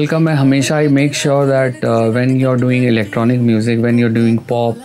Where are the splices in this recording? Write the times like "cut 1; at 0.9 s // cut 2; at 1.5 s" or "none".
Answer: none